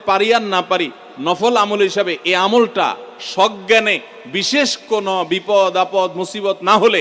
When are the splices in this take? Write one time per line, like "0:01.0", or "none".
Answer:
none